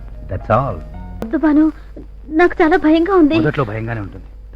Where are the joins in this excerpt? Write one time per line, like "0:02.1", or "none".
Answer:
0:01.3